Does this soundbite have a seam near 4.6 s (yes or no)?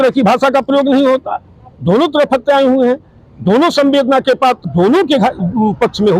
yes